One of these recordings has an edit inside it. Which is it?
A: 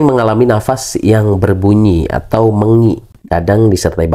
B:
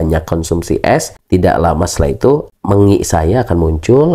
B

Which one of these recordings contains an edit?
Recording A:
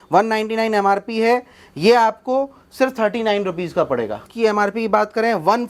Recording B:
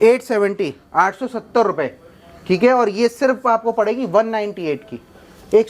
A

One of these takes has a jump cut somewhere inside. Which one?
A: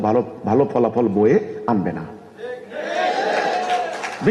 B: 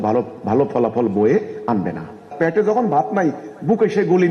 B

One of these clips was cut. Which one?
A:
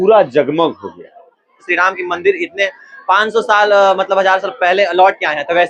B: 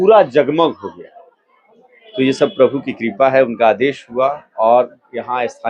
A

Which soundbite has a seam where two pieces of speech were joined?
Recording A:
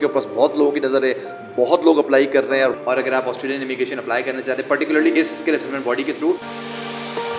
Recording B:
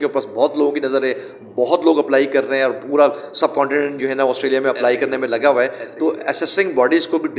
A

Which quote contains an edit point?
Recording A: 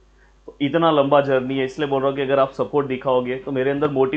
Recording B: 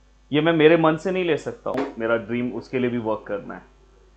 B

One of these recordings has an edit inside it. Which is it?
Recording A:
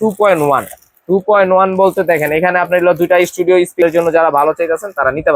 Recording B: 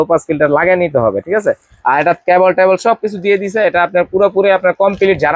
A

